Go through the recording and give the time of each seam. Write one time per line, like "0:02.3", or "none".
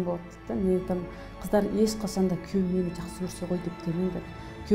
none